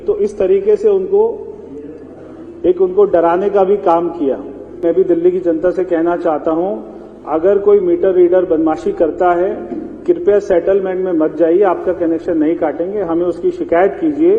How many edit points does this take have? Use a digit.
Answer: 1